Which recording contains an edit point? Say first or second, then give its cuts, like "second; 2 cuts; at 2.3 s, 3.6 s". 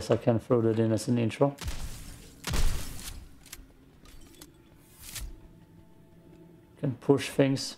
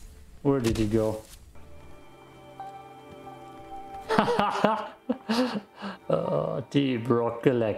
second; 1 cut; at 1.6 s